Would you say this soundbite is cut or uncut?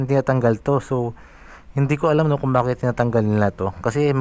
uncut